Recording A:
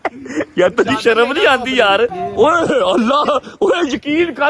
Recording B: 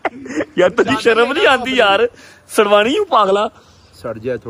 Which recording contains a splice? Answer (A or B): A